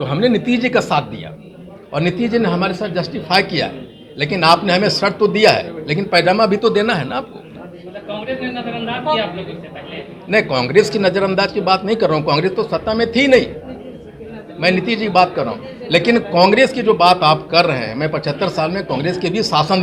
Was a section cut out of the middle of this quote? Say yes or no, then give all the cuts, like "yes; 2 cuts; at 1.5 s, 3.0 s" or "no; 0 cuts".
no; 0 cuts